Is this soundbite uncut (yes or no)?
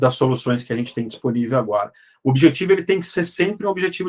yes